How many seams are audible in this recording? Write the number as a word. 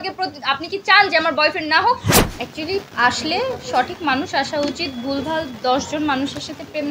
one